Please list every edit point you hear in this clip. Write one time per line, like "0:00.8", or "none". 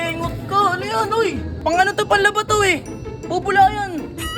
0:01.5